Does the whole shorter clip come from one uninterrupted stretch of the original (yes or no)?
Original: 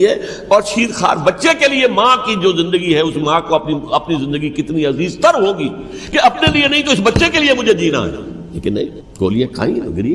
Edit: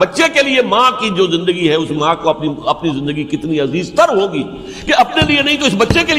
yes